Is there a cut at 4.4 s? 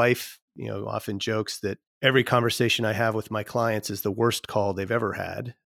no; 1 cut; at 1.9 s

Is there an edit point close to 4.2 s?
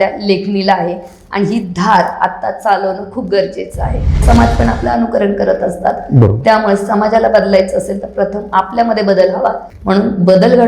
yes; 2 cuts; at 4.2 s, 9.7 s

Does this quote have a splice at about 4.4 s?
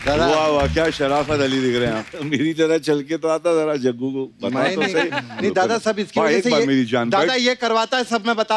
no; 1 cut; at 2.2 s

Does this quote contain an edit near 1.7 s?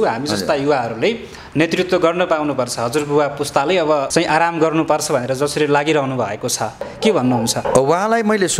no; 3 cuts; at 4.1 s, 6.9 s, 7.6 s

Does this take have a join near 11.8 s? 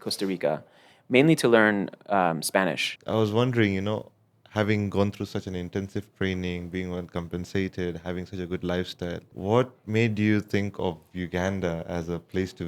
no; 2 cuts; at 2.9 s, 9.3 s

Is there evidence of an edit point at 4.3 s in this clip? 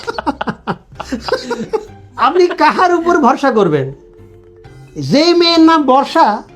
no; 1 cut; at 1.9 s

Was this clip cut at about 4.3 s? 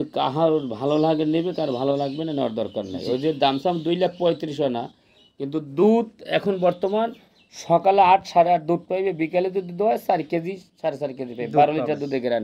no; 0 cuts

